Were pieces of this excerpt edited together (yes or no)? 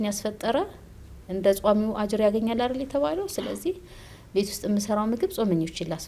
no